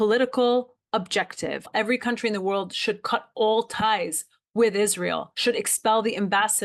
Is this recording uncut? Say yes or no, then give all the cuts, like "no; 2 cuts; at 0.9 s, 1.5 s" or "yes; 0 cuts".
no; 2 cuts; at 1.7 s, 5.3 s